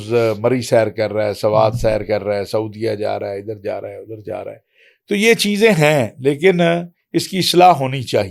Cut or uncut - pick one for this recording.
uncut